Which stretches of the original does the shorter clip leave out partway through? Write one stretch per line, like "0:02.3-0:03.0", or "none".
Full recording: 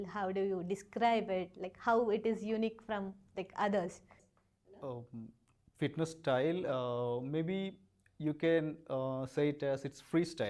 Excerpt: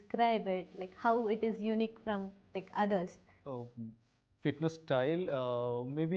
0:04.1-0:04.6